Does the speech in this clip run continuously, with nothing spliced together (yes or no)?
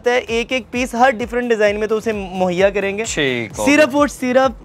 yes